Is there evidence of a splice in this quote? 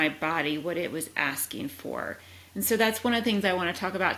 no; 0 cuts

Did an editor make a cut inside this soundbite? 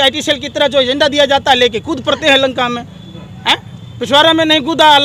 no; 0 cuts

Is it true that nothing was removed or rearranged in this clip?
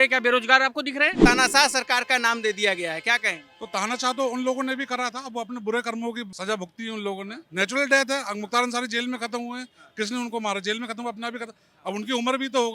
no; 2 cuts; at 1.2 s, 6.3 s

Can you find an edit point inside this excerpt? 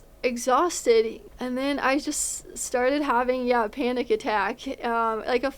yes; 1 cut; at 1.2 s

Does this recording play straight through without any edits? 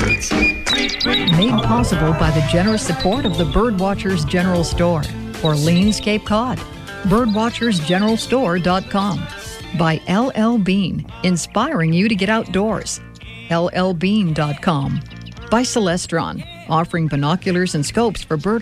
yes; 0 cuts

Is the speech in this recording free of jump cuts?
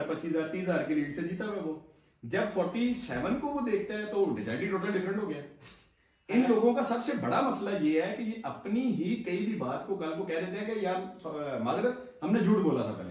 yes; 0 cuts

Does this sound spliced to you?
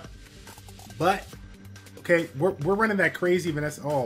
no; 0 cuts

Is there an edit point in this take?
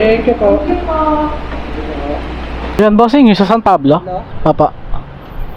yes; 1 cut; at 2.8 s

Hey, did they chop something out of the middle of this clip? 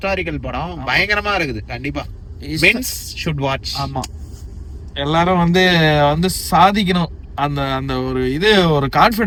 no; 0 cuts

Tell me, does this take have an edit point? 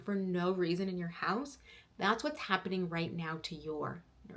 no; 0 cuts

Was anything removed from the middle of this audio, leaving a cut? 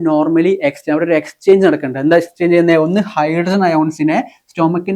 no; 0 cuts

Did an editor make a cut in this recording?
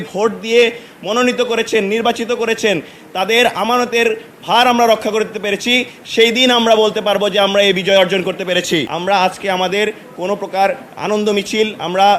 yes; 1 cut; at 8.9 s

